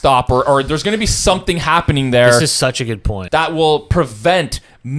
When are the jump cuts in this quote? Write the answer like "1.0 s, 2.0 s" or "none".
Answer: 3.1 s